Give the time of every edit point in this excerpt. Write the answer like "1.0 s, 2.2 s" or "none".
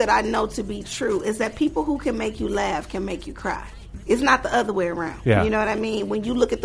4.0 s, 5.1 s